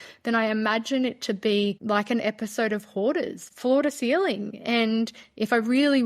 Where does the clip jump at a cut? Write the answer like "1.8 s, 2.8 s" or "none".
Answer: 1.8 s, 3.4 s